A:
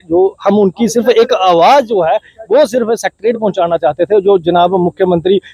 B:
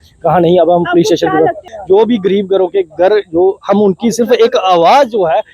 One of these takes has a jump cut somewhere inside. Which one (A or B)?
B